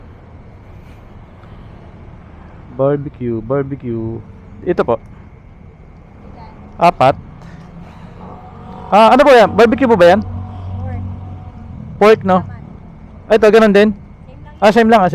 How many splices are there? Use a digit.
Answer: 0